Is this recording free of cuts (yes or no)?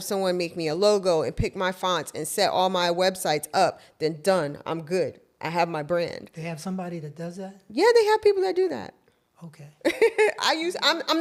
yes